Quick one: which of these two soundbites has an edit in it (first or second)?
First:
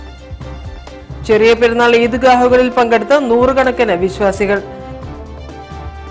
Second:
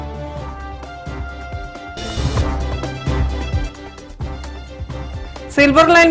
second